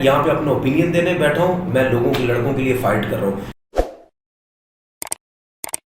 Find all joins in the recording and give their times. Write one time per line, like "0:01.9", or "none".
0:03.6